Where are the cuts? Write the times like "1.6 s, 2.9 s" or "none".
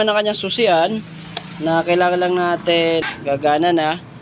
3.0 s